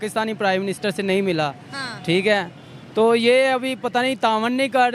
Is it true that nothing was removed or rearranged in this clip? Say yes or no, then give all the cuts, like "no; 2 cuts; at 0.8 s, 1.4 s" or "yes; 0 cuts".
yes; 0 cuts